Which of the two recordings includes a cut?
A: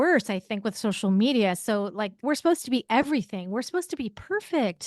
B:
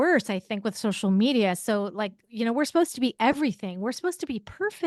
A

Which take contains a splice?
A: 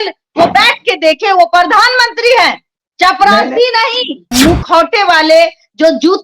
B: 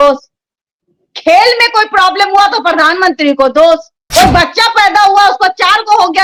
A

